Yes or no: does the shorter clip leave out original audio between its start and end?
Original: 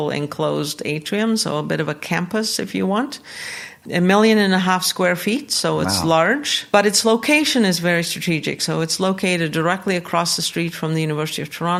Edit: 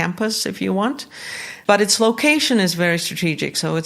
yes